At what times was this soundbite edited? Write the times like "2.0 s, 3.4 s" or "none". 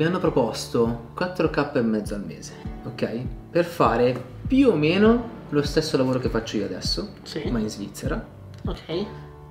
1.1 s